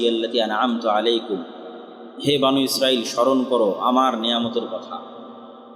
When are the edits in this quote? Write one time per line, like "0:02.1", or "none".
none